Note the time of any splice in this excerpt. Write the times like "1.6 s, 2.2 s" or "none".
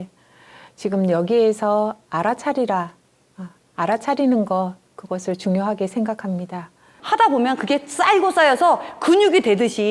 6.9 s